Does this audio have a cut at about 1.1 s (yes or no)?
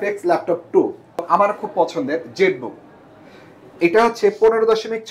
yes